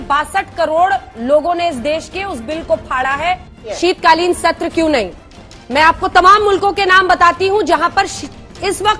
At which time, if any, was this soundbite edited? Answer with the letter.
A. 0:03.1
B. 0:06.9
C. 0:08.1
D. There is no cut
D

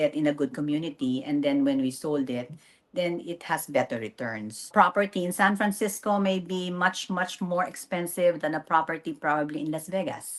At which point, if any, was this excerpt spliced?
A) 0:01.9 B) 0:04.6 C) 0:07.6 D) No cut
B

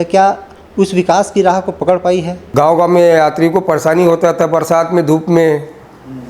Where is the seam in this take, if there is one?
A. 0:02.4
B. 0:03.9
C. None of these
A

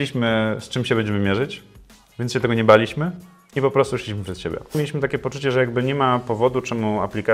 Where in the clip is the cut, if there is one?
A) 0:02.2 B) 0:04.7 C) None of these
B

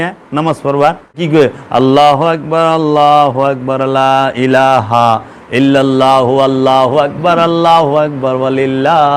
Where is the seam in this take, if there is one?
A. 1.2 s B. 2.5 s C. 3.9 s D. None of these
A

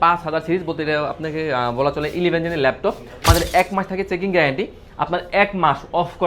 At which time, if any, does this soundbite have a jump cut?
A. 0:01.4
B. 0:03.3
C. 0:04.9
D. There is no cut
B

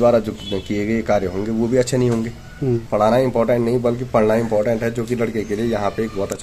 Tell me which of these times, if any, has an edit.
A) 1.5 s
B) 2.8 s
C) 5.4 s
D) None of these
B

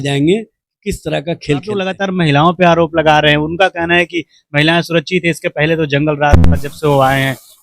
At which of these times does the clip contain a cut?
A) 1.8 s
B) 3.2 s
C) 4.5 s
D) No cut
A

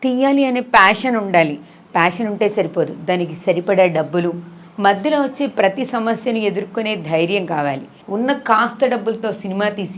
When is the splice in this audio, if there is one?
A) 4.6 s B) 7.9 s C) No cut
B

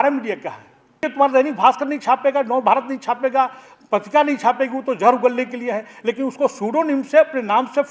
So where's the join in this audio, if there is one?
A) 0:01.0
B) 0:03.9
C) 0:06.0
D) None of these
A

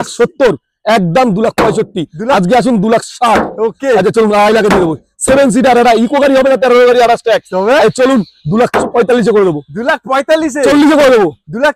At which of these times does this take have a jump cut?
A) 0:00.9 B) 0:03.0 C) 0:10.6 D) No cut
D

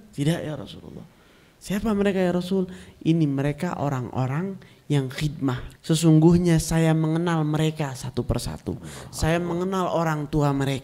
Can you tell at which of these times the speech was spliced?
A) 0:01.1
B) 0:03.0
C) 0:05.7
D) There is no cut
C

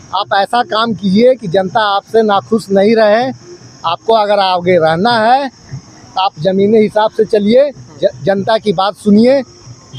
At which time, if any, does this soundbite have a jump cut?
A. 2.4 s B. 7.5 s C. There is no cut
C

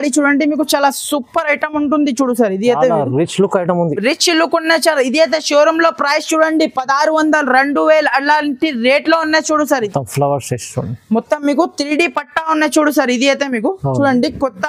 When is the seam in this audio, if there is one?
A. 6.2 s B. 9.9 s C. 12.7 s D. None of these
B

